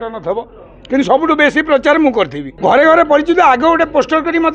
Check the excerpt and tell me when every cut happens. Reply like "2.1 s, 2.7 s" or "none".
2.4 s